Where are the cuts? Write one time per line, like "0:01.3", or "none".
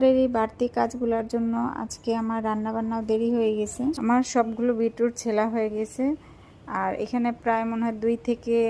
0:04.0